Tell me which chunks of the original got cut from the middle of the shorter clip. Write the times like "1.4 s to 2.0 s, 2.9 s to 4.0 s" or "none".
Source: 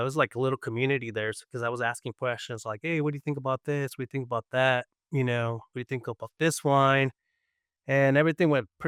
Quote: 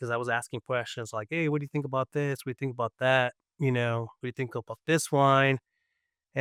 none